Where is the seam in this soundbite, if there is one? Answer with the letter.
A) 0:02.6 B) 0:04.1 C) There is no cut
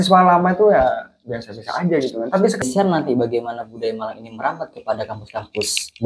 A